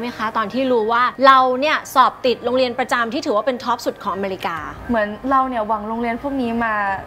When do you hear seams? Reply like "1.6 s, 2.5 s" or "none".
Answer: 1.1 s, 4.7 s